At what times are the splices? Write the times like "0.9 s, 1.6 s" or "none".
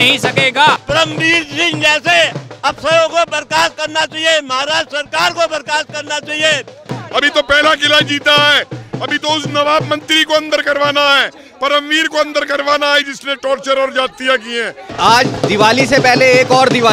0.8 s, 6.9 s, 14.8 s